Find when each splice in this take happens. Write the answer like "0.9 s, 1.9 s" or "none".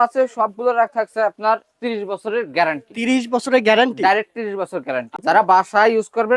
5.1 s

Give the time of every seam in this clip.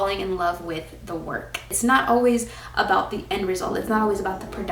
1.8 s

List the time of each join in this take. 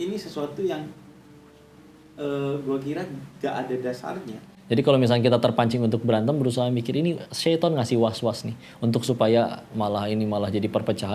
4.4 s

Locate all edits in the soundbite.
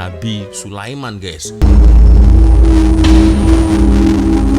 1.6 s

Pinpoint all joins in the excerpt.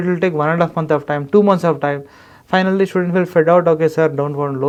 none

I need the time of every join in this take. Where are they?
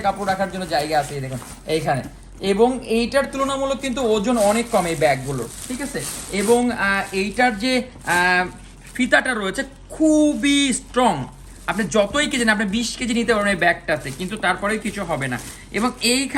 none

